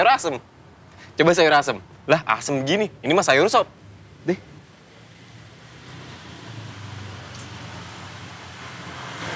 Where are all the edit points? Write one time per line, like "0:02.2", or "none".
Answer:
none